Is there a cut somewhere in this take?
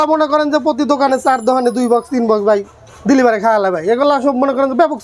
no; 0 cuts

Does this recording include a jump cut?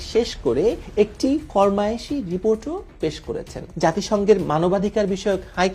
yes; 1 cut; at 3.6 s

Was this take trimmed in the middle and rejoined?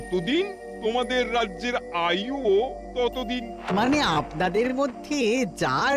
no; 0 cuts

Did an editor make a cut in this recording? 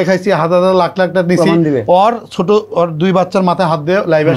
no; 0 cuts

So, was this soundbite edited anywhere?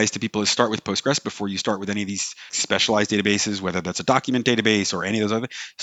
no; 0 cuts

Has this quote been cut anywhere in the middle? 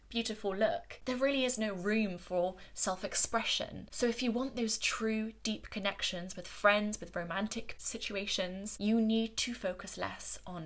yes; 3 cuts; at 0.9 s, 3.8 s, 8.4 s

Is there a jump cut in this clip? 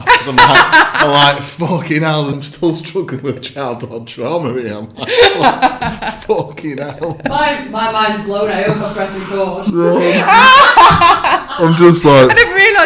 yes; 1 cut; at 2.4 s

